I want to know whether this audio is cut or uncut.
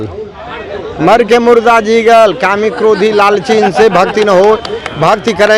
uncut